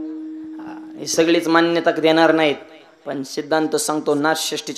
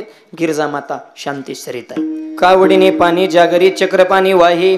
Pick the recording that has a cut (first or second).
second